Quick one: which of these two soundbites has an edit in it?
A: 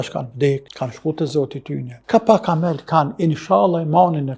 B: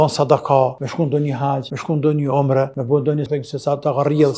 B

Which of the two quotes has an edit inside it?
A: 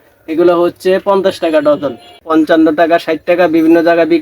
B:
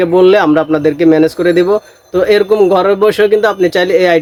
A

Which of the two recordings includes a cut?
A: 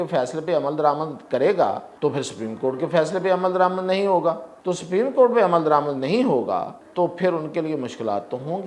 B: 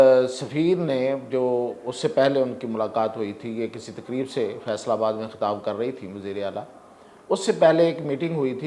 A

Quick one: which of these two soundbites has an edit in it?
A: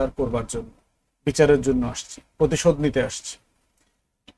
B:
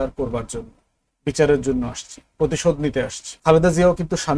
B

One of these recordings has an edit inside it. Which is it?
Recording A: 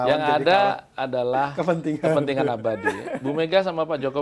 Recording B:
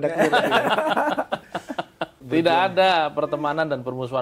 B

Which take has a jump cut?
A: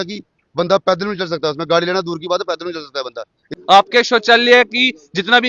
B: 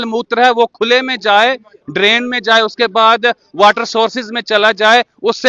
A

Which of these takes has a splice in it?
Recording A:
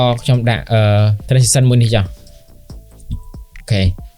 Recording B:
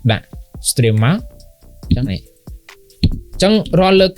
A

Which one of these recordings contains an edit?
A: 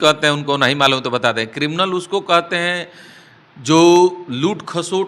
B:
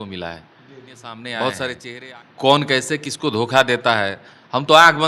B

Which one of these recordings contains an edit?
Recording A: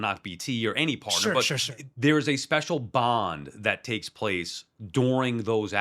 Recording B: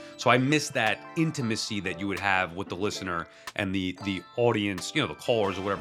A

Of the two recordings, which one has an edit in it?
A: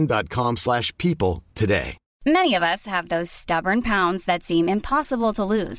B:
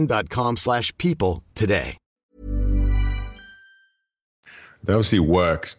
A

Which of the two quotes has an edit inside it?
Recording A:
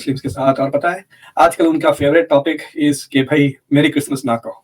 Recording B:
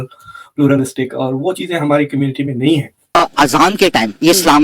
B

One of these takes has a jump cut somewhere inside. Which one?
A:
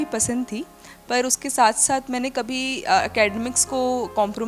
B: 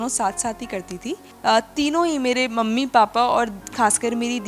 B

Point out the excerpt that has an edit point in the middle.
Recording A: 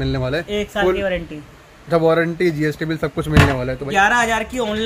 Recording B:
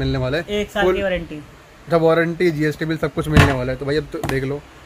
A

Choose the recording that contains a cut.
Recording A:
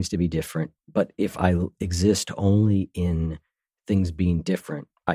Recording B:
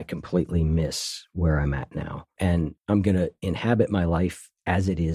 B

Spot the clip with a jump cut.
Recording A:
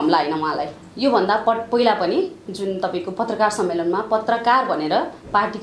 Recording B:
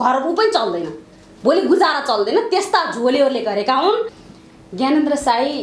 B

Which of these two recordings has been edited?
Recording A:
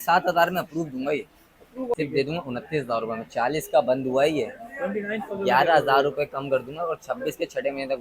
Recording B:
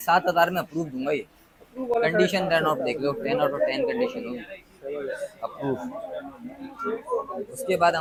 A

